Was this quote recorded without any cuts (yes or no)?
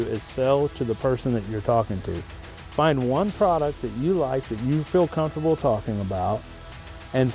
yes